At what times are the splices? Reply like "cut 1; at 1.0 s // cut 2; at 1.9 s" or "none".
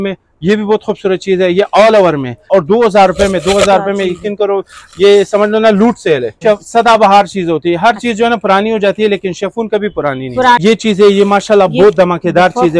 cut 1; at 2.4 s // cut 2; at 6.4 s // cut 3; at 10.6 s